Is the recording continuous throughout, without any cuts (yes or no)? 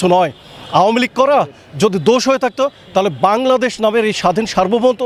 yes